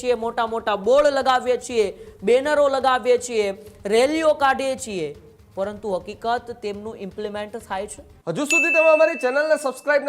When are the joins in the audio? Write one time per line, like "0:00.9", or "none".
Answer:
0:08.1